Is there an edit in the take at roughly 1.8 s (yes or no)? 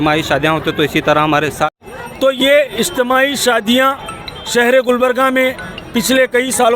yes